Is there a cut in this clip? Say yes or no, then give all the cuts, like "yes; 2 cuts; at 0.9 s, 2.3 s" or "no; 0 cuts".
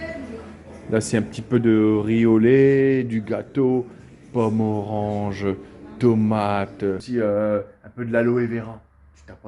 yes; 1 cut; at 7.0 s